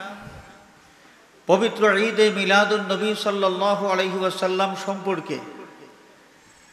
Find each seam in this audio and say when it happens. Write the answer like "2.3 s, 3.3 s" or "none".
none